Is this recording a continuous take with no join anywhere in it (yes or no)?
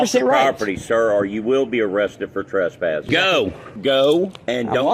no